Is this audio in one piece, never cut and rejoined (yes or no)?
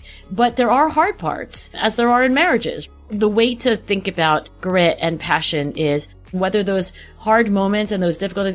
no